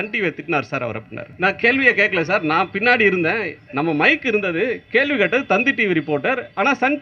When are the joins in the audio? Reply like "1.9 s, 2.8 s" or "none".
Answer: 1.2 s, 3.6 s